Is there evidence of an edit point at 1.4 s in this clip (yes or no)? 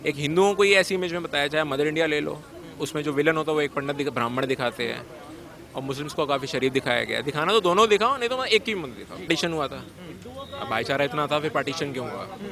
no